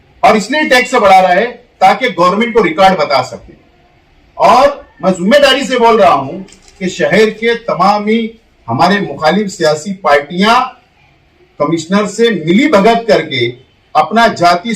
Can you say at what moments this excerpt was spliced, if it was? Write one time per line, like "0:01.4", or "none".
none